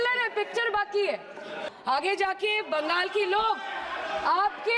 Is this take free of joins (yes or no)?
no